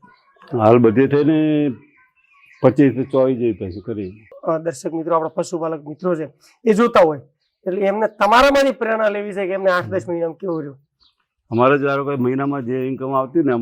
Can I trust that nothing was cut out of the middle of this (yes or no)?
no